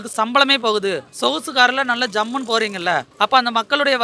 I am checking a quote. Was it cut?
no; 0 cuts

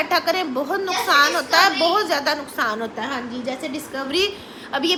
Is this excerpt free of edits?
yes; 0 cuts

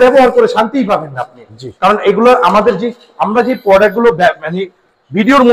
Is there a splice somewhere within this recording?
no; 0 cuts

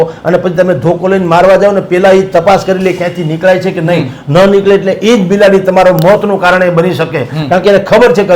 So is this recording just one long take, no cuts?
yes; 0 cuts

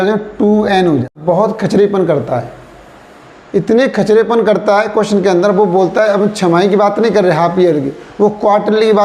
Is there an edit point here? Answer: yes; 1 cut; at 1.2 s

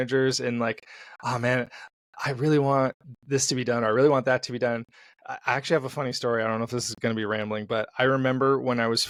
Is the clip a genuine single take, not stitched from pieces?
yes; 0 cuts

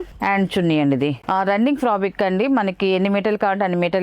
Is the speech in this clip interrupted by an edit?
yes; 1 cut; at 1.2 s

